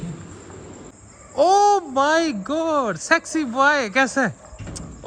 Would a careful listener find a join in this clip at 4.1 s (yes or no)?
no